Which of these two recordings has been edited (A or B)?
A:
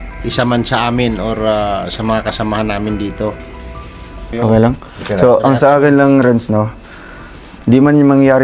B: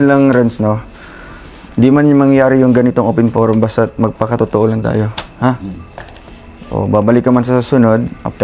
A